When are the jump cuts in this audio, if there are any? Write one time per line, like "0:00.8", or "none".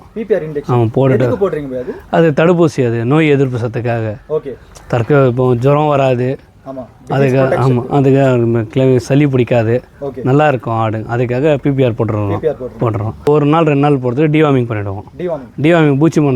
0:13.3